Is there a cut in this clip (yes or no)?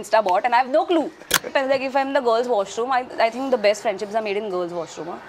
yes